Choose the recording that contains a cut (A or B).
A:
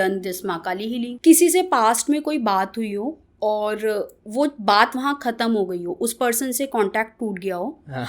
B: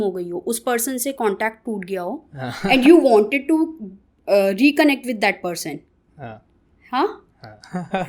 A